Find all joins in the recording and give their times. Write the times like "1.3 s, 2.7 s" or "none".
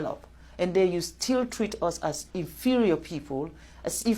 none